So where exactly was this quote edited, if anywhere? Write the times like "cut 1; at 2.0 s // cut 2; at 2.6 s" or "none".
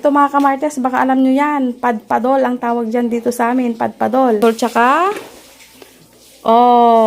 cut 1; at 4.4 s